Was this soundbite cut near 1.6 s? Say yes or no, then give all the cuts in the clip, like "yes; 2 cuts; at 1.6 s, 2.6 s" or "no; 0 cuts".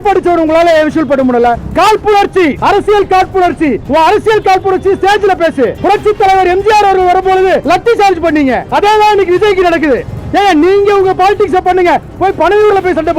yes; 4 cuts; at 1.6 s, 2.6 s, 3.8 s, 5.8 s